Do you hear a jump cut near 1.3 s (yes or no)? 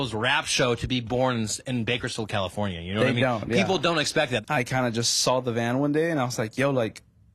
no